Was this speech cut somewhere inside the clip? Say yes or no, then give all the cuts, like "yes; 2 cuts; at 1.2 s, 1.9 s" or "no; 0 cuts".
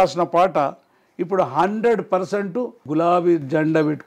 yes; 1 cut; at 2.8 s